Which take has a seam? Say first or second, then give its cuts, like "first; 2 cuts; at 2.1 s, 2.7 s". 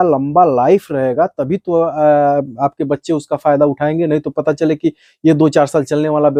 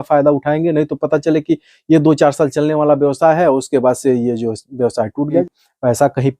second; 1 cut; at 5.3 s